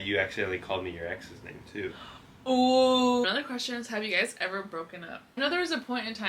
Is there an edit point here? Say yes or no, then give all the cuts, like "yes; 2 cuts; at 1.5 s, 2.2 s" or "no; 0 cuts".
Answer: yes; 2 cuts; at 3.2 s, 5.4 s